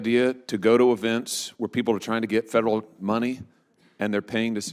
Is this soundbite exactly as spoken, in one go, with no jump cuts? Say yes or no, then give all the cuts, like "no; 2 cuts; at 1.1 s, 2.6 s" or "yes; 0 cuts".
yes; 0 cuts